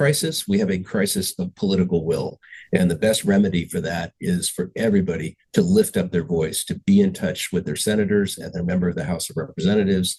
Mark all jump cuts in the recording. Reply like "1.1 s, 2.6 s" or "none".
none